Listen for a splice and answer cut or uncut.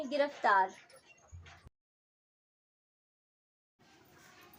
uncut